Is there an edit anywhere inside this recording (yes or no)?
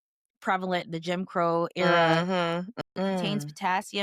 yes